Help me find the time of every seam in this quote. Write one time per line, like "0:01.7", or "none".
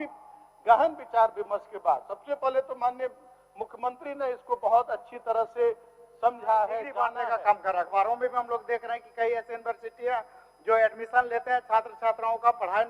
0:07.1